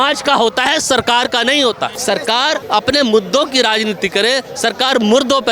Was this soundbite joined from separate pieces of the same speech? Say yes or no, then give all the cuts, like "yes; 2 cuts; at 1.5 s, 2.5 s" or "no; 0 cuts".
yes; 1 cut; at 2.4 s